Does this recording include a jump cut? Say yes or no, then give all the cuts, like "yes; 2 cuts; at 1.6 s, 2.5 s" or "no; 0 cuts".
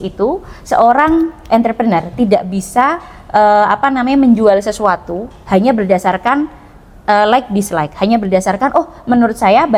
no; 0 cuts